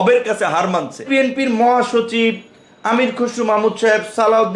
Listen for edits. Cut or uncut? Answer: cut